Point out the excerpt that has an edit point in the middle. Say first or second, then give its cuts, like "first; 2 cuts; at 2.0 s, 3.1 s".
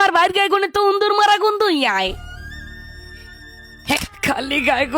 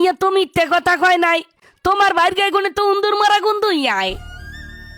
first; 1 cut; at 4.0 s